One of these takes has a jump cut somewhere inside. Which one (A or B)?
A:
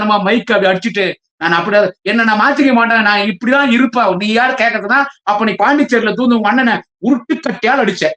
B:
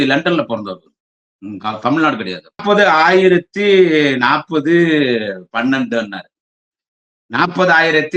B